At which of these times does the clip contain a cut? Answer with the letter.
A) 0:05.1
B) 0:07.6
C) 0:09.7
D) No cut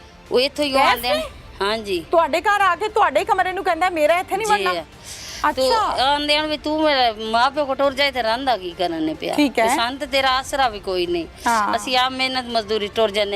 D